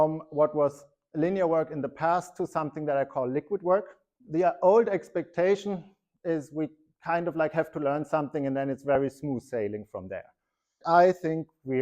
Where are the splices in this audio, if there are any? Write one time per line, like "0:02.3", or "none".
0:04.1
0:10.8